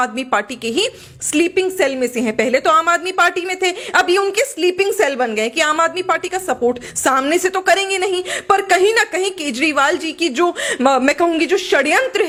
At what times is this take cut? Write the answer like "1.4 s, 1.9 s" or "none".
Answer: none